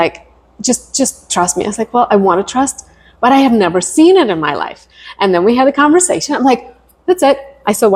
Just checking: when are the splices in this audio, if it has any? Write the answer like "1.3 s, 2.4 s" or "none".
none